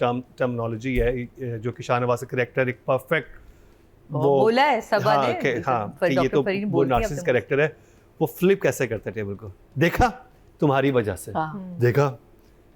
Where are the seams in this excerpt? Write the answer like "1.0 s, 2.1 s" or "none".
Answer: none